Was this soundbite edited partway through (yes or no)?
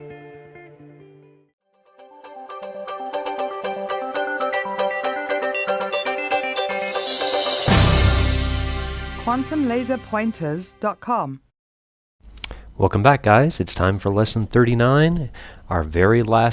no